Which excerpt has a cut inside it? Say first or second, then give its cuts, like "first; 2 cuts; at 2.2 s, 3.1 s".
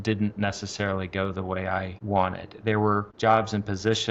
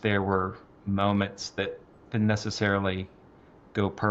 first; 2 cuts; at 2.0 s, 3.1 s